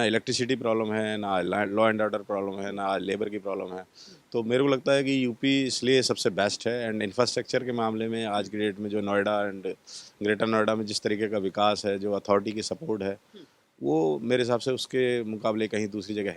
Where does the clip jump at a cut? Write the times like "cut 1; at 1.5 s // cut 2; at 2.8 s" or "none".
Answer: none